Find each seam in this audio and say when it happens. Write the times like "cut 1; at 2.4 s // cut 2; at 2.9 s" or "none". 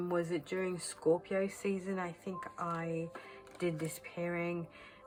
none